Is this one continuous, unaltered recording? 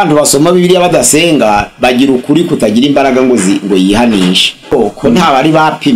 no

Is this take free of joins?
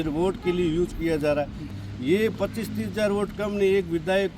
no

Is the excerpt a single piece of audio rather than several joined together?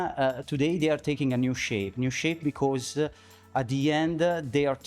yes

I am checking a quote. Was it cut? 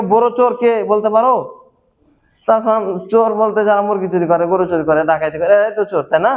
no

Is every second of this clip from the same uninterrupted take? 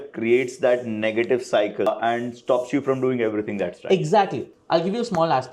no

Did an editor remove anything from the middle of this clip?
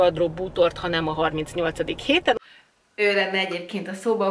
yes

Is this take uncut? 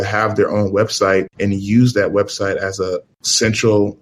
yes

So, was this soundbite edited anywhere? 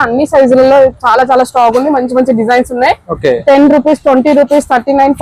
no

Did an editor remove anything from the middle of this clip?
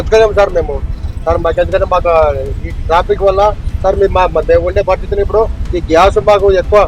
no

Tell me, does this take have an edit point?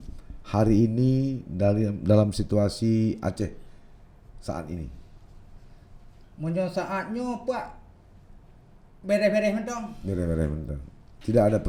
no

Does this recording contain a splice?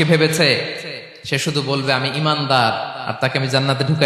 no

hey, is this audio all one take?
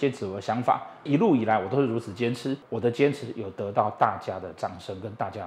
no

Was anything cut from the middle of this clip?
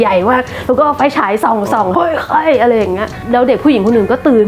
yes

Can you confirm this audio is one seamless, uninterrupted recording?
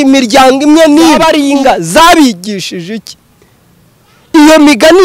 no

